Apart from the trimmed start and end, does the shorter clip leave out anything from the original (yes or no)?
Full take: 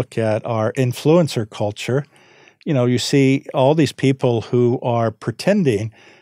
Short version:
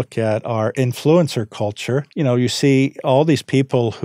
yes